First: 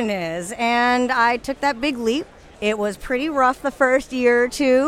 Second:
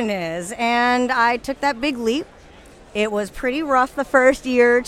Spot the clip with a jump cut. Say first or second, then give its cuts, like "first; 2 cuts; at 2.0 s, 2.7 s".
first; 1 cut; at 2.4 s